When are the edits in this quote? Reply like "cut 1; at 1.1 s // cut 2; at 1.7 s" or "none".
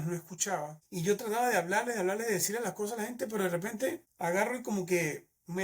cut 1; at 4.1 s